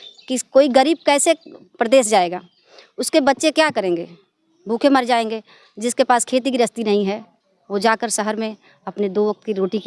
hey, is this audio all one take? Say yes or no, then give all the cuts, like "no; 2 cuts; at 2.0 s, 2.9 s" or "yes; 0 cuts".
yes; 0 cuts